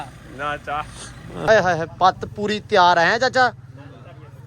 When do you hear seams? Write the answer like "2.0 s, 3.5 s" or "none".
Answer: 1.5 s